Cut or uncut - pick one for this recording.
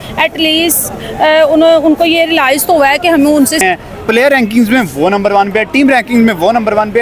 cut